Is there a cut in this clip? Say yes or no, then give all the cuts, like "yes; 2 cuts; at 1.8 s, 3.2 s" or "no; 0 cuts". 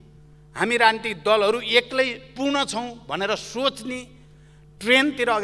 no; 0 cuts